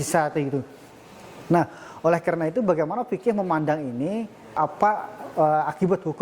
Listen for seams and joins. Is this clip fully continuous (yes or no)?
no